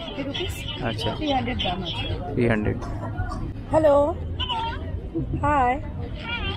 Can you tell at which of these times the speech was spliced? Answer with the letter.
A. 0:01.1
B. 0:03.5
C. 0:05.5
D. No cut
B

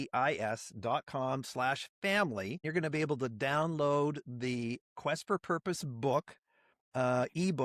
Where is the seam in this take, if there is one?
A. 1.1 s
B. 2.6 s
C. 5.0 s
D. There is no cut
B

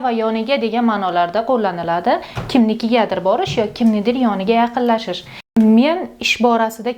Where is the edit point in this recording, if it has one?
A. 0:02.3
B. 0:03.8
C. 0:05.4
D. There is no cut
C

